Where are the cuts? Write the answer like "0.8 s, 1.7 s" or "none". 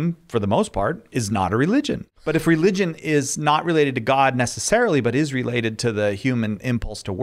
2.1 s